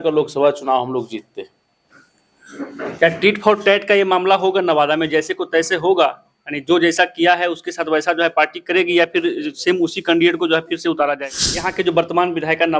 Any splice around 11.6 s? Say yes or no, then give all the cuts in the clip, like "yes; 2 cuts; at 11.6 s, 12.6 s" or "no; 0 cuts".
yes; 1 cut; at 11.6 s